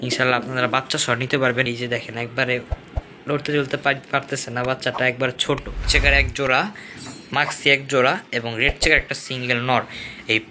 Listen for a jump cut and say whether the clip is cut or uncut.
cut